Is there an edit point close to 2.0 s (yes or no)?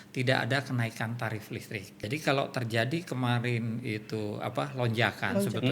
yes